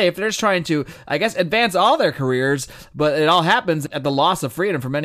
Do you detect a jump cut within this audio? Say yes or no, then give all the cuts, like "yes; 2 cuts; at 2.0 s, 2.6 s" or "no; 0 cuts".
yes; 1 cut; at 3.8 s